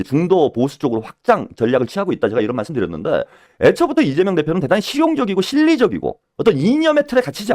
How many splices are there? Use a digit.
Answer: 1